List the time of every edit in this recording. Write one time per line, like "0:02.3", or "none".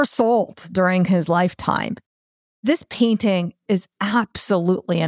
0:02.5